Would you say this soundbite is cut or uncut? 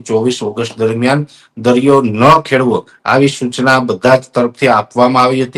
uncut